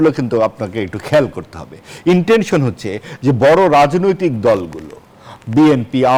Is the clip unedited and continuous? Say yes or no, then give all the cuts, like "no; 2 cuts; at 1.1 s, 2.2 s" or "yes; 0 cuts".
yes; 0 cuts